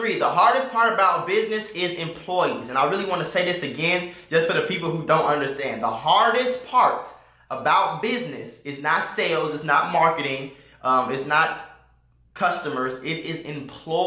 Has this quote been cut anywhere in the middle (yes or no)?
no